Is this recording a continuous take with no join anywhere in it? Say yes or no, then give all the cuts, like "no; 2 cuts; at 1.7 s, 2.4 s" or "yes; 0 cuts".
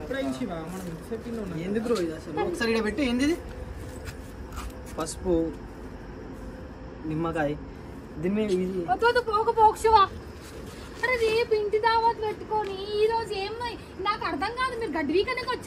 yes; 0 cuts